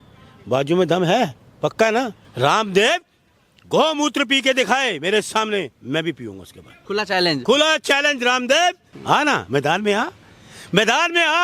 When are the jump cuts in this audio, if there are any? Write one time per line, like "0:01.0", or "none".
0:02.2
0:06.8
0:08.9